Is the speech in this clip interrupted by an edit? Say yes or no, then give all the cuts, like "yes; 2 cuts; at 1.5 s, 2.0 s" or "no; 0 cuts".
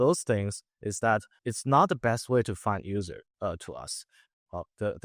yes; 1 cut; at 1.3 s